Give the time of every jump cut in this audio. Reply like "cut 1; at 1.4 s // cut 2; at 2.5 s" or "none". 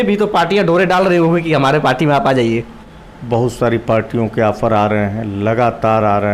cut 1; at 2.8 s